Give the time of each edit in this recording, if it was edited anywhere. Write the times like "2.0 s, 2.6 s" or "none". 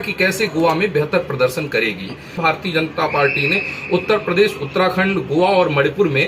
2.4 s